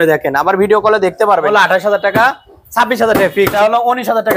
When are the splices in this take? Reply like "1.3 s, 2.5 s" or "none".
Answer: 1.5 s, 3.5 s